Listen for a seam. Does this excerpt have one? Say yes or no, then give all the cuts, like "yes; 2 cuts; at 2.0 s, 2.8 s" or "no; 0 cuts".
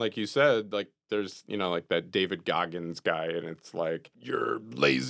yes; 1 cut; at 4.1 s